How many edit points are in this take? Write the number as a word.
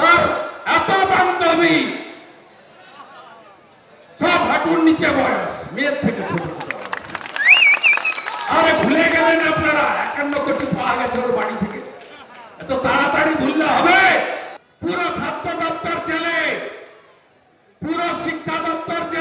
one